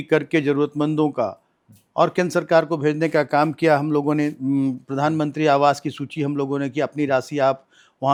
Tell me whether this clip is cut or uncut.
uncut